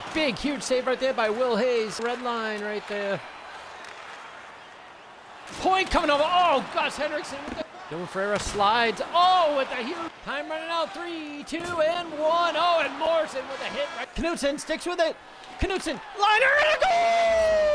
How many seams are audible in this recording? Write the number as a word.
four